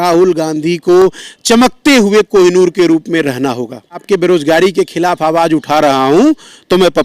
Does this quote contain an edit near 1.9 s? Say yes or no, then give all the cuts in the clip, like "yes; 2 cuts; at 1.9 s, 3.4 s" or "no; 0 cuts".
no; 1 cut; at 4.0 s